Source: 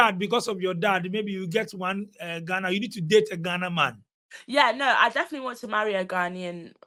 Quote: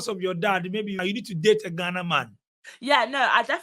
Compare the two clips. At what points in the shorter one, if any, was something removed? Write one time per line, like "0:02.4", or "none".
0:01.0

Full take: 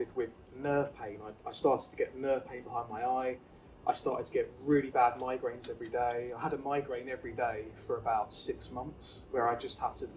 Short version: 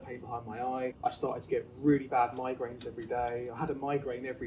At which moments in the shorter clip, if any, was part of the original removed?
0:01.0

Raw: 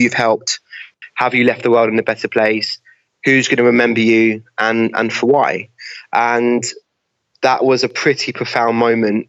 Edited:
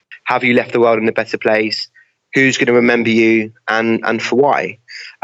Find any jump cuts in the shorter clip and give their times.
none

